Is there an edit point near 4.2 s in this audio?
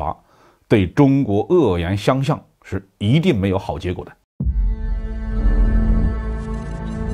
yes; 1 cut; at 4.2 s

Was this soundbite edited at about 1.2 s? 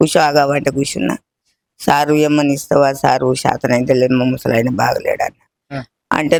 no; 0 cuts

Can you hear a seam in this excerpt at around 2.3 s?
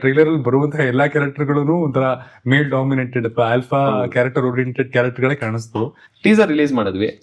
no; 1 cut; at 6.0 s

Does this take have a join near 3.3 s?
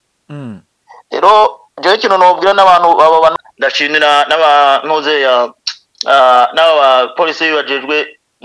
yes; 1 cut; at 3.3 s

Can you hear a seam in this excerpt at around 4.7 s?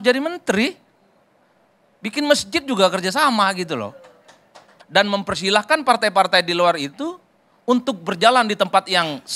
yes; 1 cut; at 4.7 s

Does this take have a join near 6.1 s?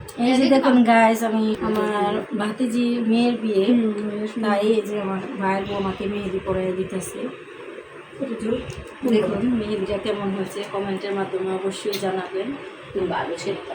no; 1 cut; at 1.6 s

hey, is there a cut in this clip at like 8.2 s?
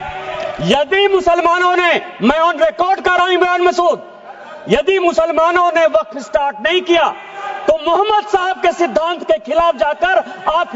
no; 0 cuts

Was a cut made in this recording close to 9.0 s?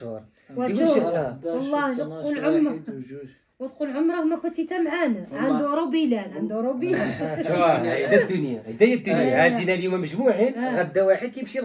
no; 0 cuts

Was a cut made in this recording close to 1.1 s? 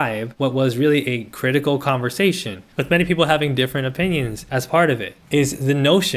no; 1 cut; at 4.9 s

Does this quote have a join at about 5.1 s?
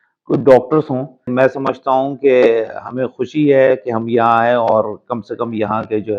no; 1 cut; at 1.3 s

